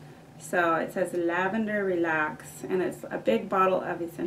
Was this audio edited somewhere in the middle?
no; 0 cuts

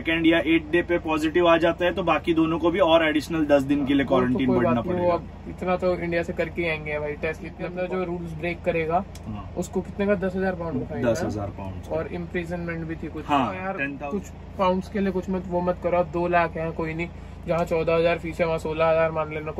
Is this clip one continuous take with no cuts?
no; 2 cuts; at 7.8 s, 13.8 s

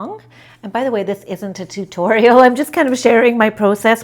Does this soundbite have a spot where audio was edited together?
no; 0 cuts

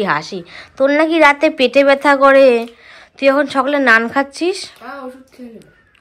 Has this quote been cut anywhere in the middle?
no; 0 cuts

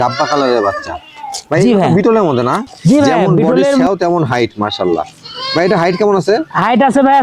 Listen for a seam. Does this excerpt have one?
yes; 1 cut; at 3.9 s

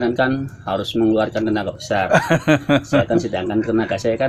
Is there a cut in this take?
no; 0 cuts

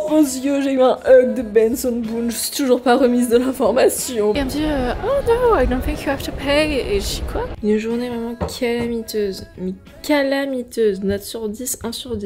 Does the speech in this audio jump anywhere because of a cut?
yes; 2 cuts; at 4.3 s, 7.5 s

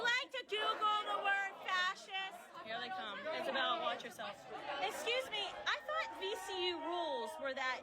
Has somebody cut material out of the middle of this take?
yes; 1 cut; at 5.0 s

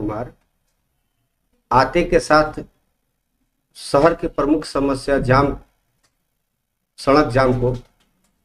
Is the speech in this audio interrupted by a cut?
no; 0 cuts

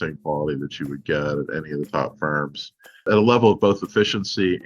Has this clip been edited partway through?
yes; 1 cut; at 3.1 s

